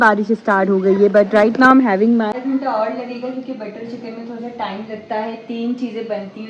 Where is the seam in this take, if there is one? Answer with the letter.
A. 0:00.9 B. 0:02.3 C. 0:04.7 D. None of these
B